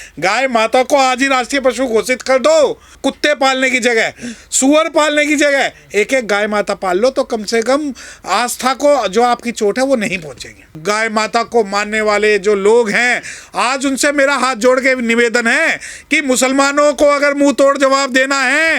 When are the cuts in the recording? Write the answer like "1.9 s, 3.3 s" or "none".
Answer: 2.9 s, 10.8 s